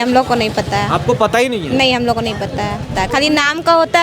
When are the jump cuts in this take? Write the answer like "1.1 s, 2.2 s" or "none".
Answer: 2.9 s